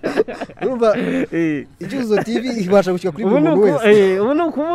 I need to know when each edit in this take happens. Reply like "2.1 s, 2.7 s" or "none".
none